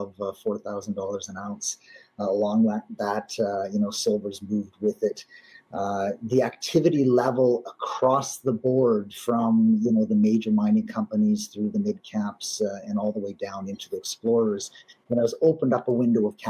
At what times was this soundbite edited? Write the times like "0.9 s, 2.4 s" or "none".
none